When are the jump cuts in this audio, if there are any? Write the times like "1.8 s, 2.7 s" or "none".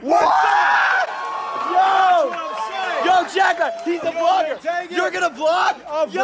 none

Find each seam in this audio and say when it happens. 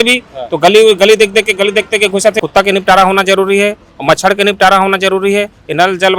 2.4 s

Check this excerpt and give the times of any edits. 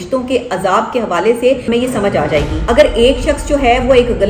1.6 s, 2.5 s

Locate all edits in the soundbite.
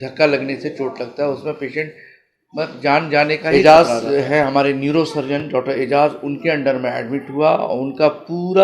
3.5 s

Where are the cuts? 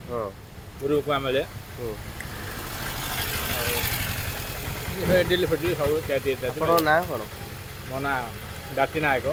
none

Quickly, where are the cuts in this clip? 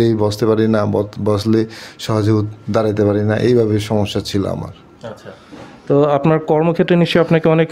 none

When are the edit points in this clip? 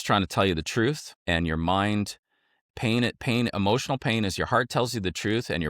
1.1 s

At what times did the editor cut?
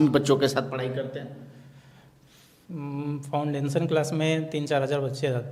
none

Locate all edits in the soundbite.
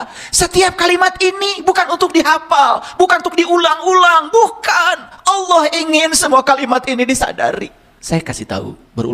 7.9 s

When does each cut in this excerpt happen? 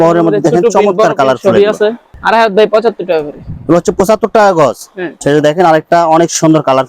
2.2 s, 5.1 s

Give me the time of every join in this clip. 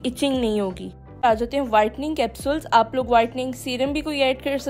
1.2 s

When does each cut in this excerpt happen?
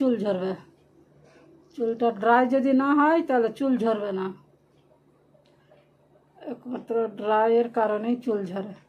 none

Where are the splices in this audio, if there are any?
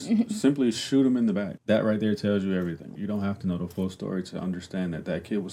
1.5 s, 2.9 s

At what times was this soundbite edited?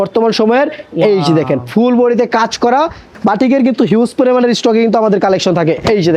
3.1 s

